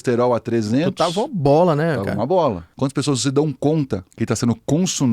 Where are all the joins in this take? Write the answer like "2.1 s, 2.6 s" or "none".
2.7 s, 4.1 s